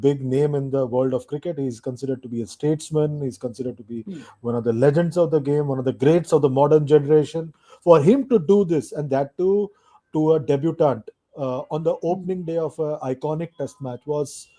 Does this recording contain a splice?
no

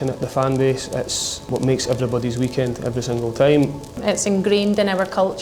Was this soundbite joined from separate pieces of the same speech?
yes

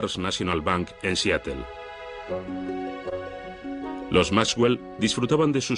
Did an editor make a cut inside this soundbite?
no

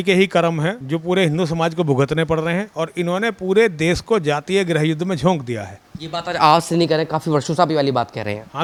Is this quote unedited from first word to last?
yes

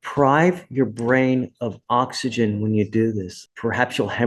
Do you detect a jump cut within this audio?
yes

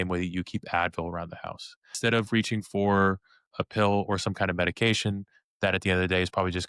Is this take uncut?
no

